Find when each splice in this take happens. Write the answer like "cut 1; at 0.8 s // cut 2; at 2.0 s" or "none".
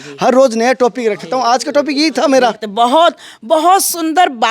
cut 1; at 2.6 s